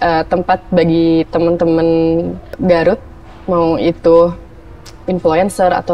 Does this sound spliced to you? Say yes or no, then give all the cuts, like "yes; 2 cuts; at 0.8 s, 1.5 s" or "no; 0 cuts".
yes; 1 cut; at 2.5 s